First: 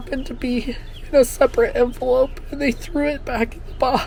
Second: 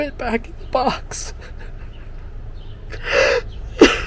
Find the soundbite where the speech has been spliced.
second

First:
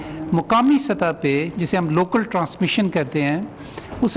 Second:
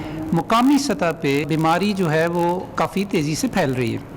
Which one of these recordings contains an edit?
second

